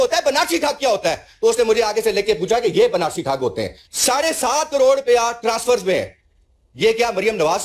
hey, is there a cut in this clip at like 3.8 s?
yes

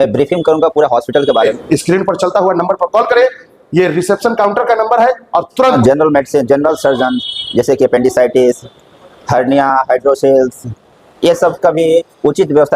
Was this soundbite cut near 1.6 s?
yes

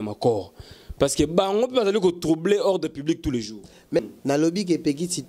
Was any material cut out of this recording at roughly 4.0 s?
yes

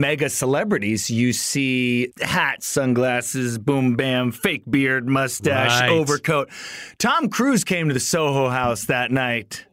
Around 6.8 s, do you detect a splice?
no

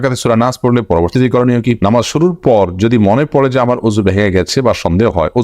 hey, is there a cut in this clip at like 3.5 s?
no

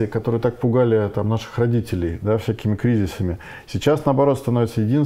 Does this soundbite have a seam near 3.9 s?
no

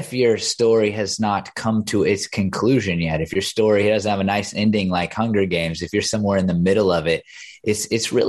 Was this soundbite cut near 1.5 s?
no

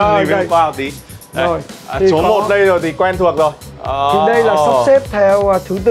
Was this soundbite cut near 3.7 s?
yes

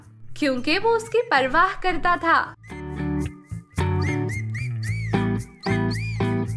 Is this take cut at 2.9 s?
yes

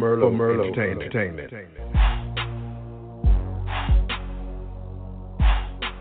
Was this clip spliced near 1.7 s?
yes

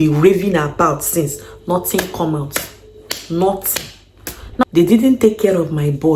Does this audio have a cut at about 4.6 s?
yes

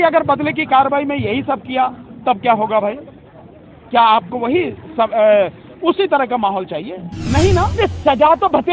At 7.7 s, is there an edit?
yes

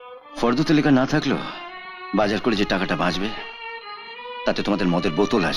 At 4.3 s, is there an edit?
no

